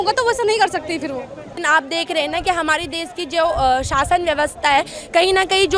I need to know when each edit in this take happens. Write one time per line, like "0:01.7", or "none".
0:01.5